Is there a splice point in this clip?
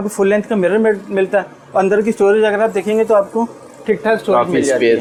no; 0 cuts

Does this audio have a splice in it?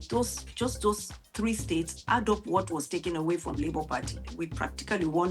yes; 1 cut; at 4.2 s

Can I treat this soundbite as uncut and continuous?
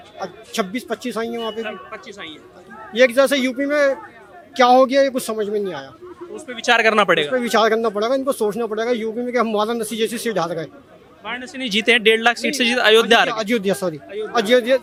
yes; 0 cuts

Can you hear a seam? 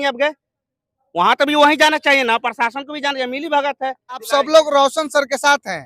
yes; 1 cut; at 4.2 s

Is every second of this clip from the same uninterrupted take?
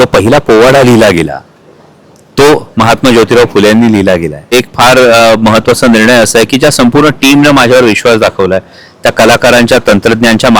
no; 1 cut; at 4.5 s

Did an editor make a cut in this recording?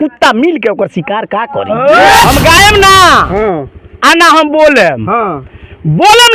yes; 1 cut; at 2.2 s

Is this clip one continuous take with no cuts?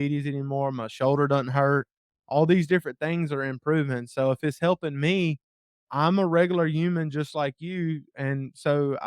no; 1 cut; at 5.9 s

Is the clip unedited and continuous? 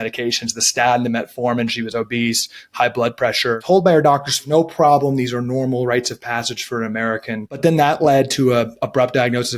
no; 3 cuts; at 3.6 s, 4.4 s, 7.6 s

